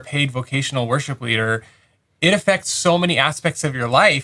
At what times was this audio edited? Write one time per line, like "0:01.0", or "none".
none